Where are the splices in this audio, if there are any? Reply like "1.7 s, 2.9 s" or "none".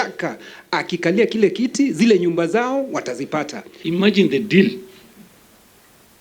3.6 s